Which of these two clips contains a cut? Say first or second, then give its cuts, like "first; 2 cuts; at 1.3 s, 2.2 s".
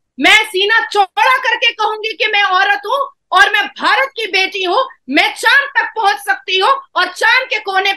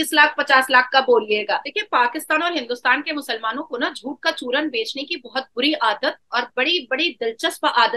second; 1 cut; at 1.7 s